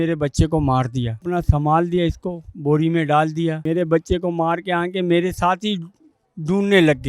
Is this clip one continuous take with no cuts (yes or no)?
no